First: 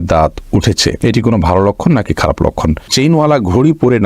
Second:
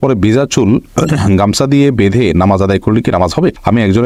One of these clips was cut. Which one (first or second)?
first